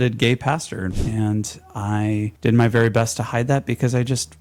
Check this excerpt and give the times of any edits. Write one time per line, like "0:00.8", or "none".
0:01.0
0:02.3